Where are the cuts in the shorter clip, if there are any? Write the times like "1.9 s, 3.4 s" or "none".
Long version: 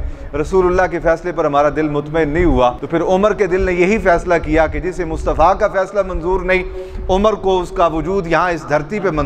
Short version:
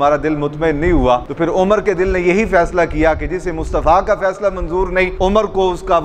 5.1 s